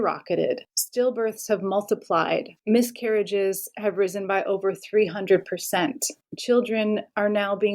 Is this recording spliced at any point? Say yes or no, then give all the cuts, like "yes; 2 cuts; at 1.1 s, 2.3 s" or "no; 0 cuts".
yes; 1 cut; at 2.5 s